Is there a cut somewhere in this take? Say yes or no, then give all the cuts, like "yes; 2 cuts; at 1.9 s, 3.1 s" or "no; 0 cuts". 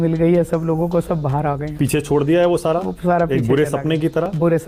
no; 0 cuts